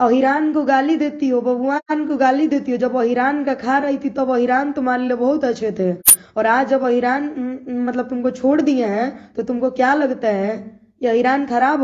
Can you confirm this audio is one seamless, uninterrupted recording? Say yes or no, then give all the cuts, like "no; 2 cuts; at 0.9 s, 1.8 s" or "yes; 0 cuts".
yes; 0 cuts